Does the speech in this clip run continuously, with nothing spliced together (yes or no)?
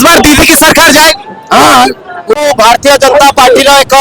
no